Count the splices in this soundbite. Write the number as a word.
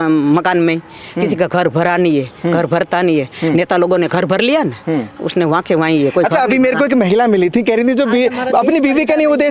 zero